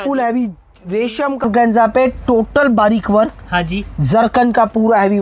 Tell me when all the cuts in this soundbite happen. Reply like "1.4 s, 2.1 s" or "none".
1.4 s